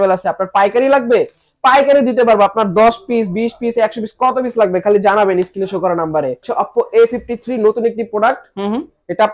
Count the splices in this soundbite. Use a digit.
1